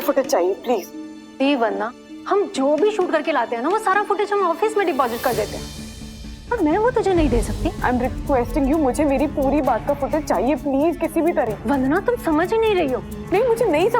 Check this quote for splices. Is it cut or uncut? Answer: cut